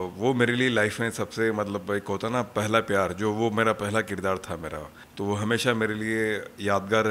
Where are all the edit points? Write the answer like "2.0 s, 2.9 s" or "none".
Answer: none